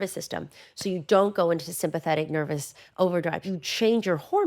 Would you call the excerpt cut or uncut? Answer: cut